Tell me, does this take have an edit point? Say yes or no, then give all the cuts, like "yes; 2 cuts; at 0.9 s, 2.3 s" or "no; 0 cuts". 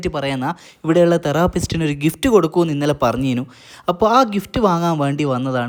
no; 0 cuts